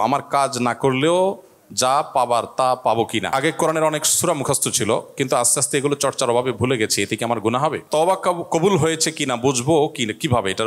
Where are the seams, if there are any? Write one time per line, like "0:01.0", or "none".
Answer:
0:03.3
0:07.8